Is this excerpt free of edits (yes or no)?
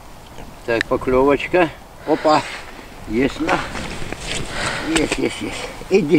yes